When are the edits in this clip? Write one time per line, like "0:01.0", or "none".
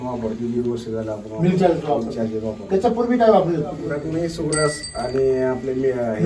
none